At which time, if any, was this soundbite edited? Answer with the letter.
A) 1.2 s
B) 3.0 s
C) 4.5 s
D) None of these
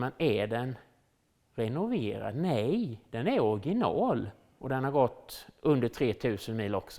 C